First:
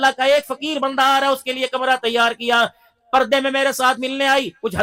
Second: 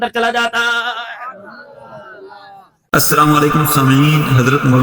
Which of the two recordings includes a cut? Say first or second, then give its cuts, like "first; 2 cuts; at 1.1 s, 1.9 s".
second; 1 cut; at 2.8 s